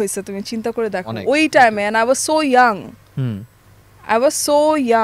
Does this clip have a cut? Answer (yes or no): no